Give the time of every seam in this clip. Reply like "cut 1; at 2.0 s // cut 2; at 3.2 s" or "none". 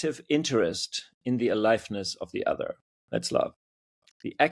none

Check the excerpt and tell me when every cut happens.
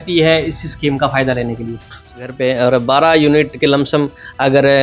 cut 1; at 2.1 s

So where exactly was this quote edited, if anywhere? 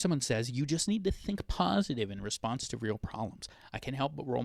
none

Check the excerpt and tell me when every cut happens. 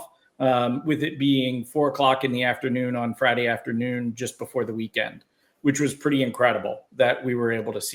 none

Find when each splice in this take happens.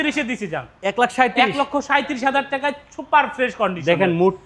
none

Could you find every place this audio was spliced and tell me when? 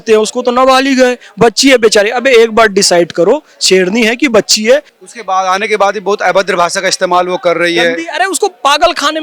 cut 1; at 4.9 s

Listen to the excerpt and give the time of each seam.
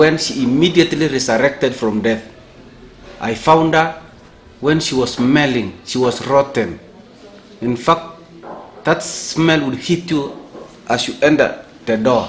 none

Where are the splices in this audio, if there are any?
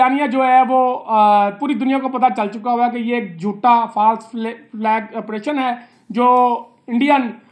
none

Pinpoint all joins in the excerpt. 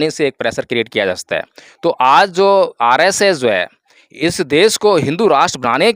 none

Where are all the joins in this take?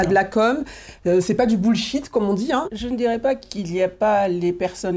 cut 1; at 2.7 s

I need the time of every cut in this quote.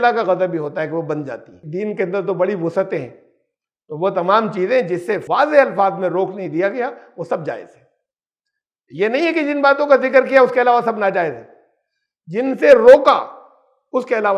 cut 1; at 1.6 s // cut 2; at 5.2 s

